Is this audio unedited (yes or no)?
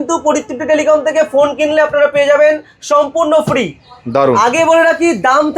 yes